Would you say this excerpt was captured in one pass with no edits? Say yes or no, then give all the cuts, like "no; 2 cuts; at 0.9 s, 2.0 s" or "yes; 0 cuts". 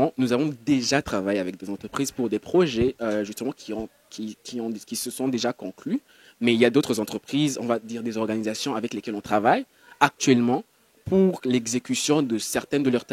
yes; 0 cuts